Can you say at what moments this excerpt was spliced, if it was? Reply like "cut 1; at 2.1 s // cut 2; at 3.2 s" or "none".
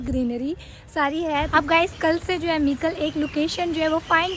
cut 1; at 1.5 s